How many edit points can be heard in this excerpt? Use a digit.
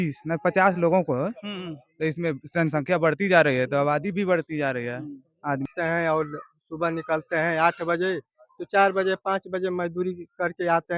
1